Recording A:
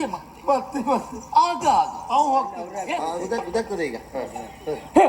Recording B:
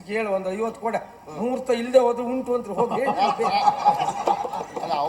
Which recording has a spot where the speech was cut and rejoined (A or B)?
A